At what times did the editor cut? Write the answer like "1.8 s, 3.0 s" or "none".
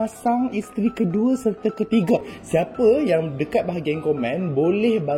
2.3 s